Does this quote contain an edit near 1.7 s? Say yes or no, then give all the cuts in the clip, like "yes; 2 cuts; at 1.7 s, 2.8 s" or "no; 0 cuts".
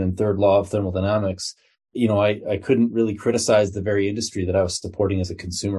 no; 0 cuts